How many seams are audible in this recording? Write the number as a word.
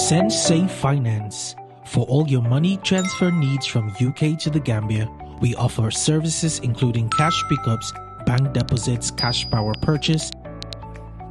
zero